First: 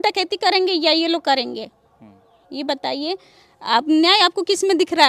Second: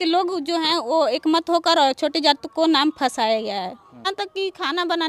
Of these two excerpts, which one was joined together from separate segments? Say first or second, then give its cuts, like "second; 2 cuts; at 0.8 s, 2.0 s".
second; 1 cut; at 4.0 s